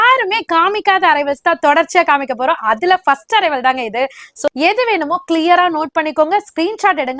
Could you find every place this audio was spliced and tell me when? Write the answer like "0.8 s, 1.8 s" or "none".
4.5 s